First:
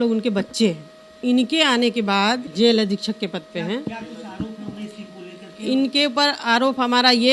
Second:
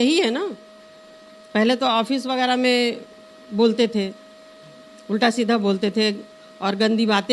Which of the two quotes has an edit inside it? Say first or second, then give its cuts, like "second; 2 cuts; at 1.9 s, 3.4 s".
first; 2 cuts; at 1.2 s, 2.5 s